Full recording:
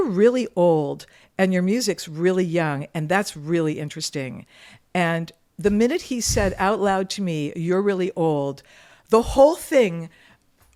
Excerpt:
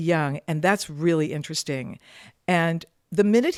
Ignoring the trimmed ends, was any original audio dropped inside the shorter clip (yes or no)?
no